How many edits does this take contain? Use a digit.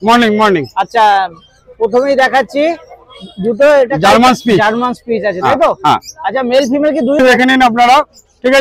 1